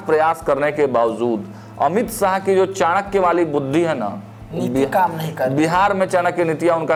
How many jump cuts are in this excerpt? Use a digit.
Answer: 0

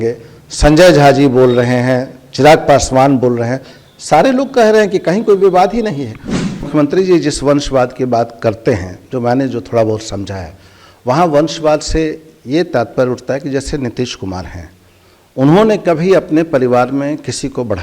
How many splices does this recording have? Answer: 1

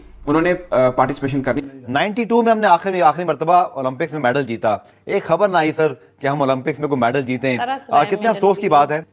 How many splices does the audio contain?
1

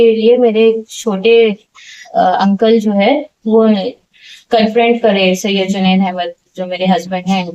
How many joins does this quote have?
0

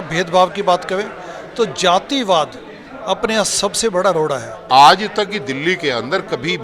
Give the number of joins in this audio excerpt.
1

